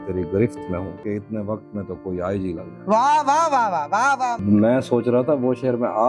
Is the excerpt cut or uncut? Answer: cut